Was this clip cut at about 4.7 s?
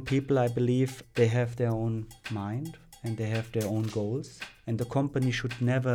yes; 4 cuts; at 1.0 s, 2.2 s, 3.1 s, 4.7 s

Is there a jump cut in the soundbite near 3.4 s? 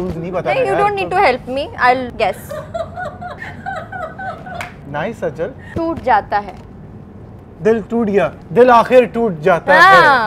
yes; 5 cuts; at 2.1 s, 3.4 s, 4.8 s, 5.6 s, 8.4 s

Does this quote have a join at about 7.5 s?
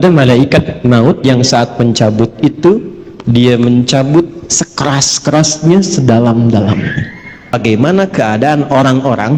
yes; 1 cut; at 7.5 s

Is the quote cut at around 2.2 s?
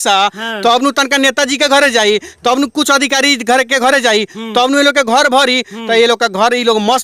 no; 0 cuts

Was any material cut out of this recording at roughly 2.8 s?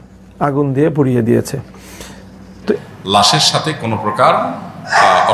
yes; 1 cut; at 2.8 s

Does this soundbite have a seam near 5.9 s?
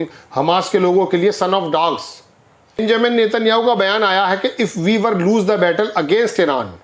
no; 1 cut; at 2.8 s

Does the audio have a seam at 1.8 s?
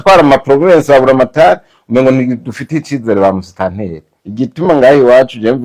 no; 1 cut; at 4.5 s

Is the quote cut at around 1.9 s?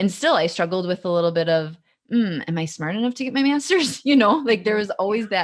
no; 0 cuts

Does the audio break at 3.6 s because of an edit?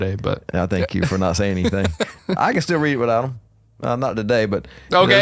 no; 1 cut; at 2.2 s

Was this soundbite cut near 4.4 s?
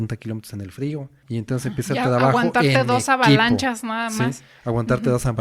no; 1 cut; at 1.2 s

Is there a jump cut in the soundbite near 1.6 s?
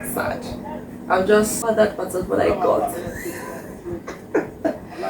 yes; 1 cut; at 1.6 s

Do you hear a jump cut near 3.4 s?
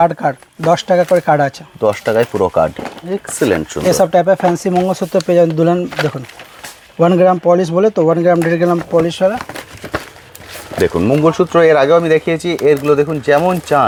no; 0 cuts

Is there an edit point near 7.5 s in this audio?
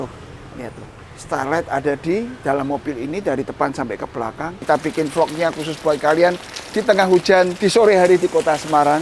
yes; 2 cuts; at 4.6 s, 7.5 s

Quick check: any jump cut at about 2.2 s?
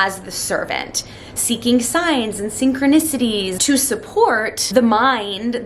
no; 2 cuts; at 3.5 s, 4.6 s

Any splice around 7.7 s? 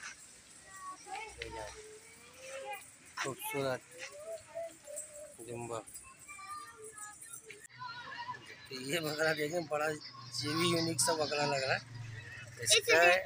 yes; 1 cut; at 7.7 s

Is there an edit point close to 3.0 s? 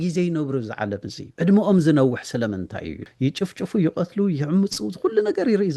yes; 2 cuts; at 1.2 s, 3.0 s

